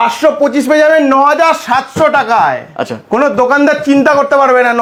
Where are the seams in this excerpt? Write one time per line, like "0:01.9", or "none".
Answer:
none